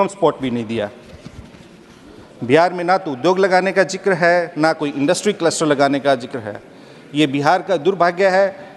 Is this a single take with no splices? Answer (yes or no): yes